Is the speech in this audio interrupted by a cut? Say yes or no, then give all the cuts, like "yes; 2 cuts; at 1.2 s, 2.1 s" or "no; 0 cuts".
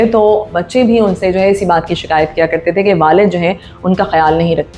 no; 0 cuts